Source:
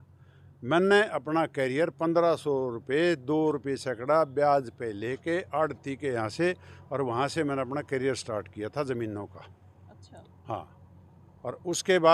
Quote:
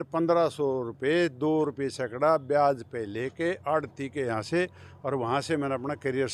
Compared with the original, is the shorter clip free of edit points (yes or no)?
yes